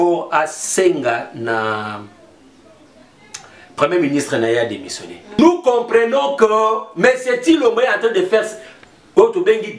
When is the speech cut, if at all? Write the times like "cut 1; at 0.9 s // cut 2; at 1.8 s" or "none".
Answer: cut 1; at 5.4 s